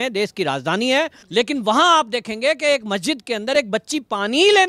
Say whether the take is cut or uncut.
cut